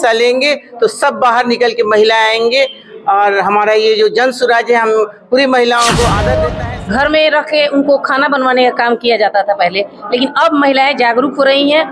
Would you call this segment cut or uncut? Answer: cut